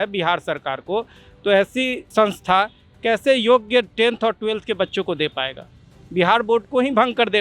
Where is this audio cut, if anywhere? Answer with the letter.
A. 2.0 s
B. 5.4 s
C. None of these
A